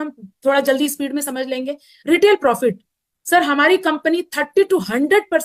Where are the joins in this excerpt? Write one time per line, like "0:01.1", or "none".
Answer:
none